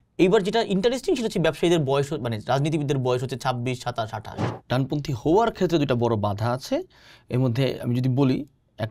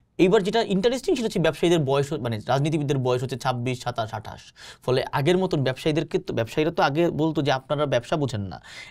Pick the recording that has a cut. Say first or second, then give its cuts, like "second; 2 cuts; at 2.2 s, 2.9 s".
first; 1 cut; at 4.5 s